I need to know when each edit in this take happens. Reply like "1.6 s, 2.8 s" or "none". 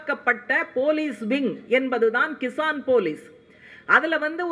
none